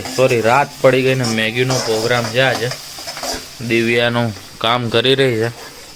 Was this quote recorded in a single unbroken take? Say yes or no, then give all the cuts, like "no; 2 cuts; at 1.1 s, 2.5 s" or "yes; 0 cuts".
yes; 0 cuts